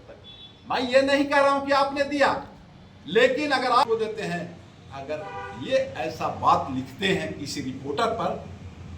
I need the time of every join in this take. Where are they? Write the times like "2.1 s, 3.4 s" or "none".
3.8 s